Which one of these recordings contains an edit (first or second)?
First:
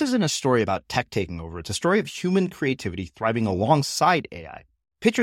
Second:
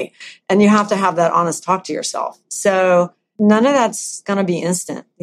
second